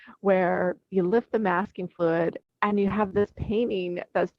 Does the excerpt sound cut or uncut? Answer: cut